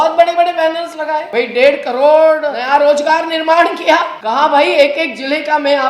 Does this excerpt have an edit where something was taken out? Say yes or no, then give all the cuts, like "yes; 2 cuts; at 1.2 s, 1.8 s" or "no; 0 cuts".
yes; 3 cuts; at 1.3 s, 2.5 s, 4.2 s